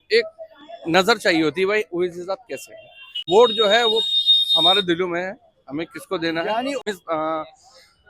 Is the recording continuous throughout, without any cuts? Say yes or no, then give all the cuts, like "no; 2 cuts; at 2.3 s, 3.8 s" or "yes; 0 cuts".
no; 2 cuts; at 3.3 s, 6.8 s